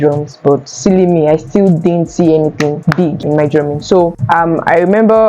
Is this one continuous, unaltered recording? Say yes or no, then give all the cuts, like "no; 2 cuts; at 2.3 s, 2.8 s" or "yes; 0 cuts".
no; 2 cuts; at 3.2 s, 4.2 s